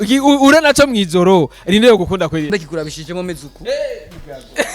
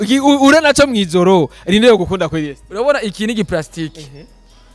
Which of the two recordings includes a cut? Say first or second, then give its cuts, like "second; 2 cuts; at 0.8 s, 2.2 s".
first; 1 cut; at 2.5 s